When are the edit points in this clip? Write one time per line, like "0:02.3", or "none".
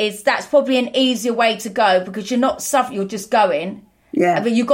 none